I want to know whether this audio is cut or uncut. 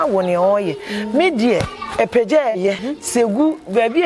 cut